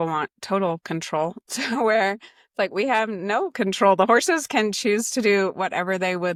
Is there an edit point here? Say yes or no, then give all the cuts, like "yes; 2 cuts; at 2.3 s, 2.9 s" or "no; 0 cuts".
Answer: no; 0 cuts